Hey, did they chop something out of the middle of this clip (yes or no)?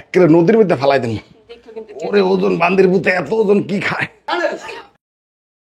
yes